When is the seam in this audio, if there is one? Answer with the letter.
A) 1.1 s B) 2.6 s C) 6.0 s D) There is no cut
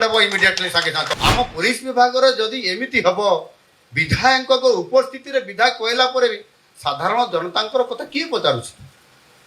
A